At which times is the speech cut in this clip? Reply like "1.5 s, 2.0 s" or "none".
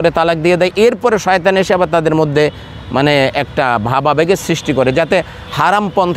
none

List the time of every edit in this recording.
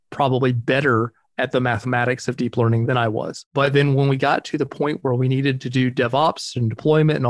2.9 s

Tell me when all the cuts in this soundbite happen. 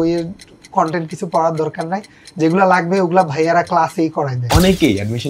4.4 s

